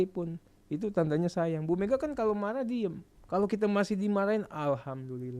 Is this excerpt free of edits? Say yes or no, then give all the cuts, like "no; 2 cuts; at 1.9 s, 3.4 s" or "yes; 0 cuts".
no; 1 cut; at 3.1 s